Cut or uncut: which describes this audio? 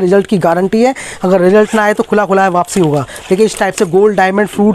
uncut